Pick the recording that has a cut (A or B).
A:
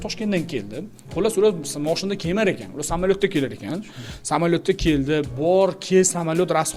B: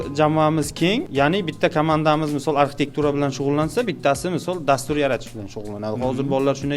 B